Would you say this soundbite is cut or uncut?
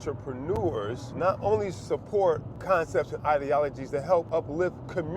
cut